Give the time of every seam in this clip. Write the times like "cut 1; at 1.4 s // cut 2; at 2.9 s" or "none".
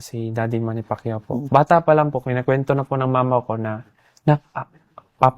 cut 1; at 1.5 s